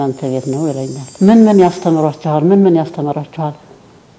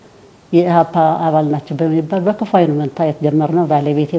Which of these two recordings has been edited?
first; 1 cut; at 1.0 s

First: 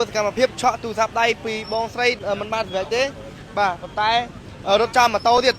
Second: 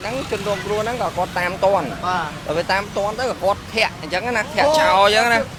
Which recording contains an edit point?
first; 1 cut; at 2.2 s

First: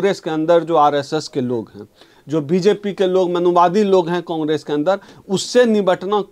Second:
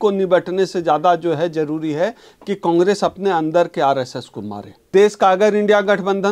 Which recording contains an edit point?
second; 1 cut; at 4.7 s

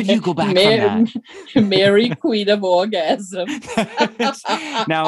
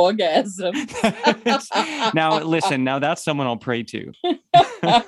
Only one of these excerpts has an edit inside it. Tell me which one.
second; 1 cut; at 4.0 s

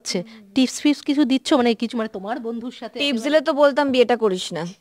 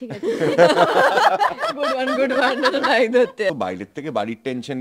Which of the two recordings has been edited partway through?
second; 1 cut; at 3.5 s

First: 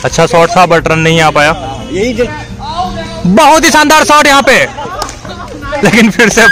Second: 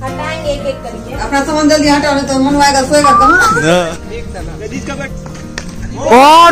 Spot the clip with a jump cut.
second; 1 cut; at 3.8 s

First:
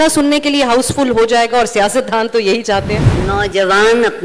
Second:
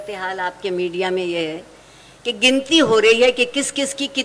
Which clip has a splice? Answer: first; 1 cut; at 3.1 s

